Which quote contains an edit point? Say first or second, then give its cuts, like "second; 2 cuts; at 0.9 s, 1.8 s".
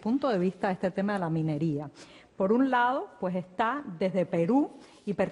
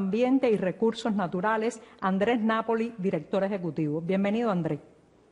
second; 1 cut; at 2.7 s